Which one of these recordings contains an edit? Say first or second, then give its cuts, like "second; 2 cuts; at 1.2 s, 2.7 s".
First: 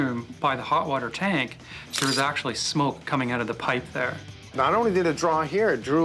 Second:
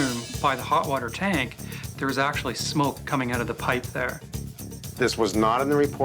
second; 1 cut; at 4.5 s